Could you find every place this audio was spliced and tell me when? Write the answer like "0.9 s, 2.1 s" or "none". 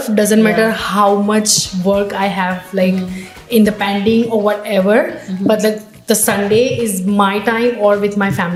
none